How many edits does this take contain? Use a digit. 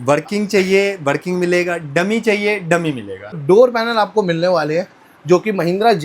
1